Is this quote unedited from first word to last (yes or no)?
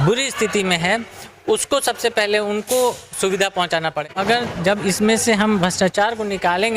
no